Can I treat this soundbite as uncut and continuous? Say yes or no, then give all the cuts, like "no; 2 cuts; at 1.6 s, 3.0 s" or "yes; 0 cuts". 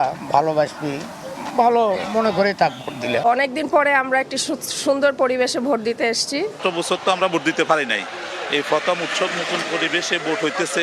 no; 2 cuts; at 3.1 s, 6.6 s